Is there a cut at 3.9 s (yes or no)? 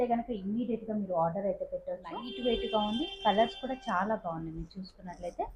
no